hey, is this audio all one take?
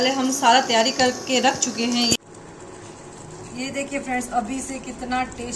no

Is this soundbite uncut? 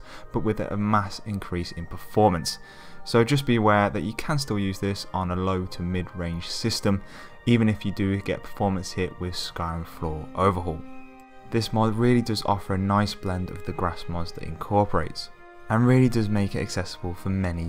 yes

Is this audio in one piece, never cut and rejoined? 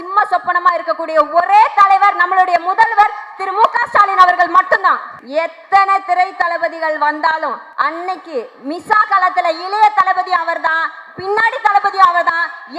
no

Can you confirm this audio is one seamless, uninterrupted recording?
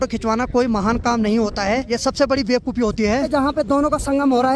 no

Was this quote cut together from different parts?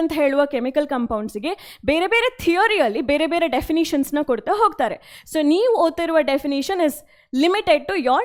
no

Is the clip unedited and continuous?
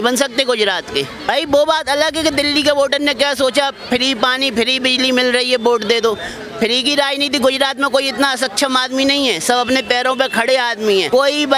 yes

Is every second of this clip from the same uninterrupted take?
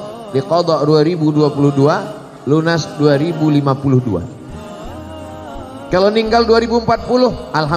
no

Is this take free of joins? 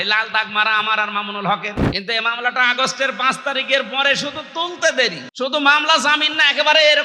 no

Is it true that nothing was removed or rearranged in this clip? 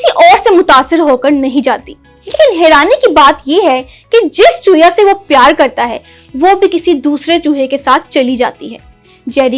yes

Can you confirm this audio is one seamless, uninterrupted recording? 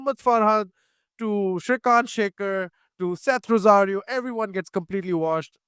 yes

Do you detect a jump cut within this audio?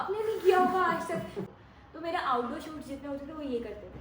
yes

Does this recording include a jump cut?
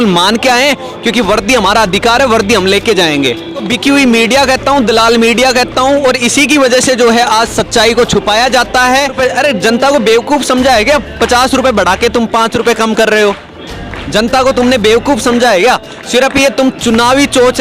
yes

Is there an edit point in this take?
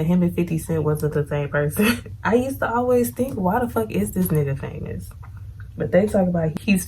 yes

